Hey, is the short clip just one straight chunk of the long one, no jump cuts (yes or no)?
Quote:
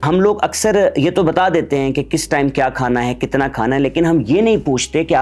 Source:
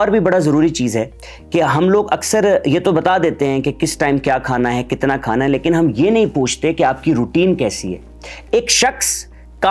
yes